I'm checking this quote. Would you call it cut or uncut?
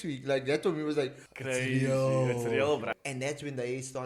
cut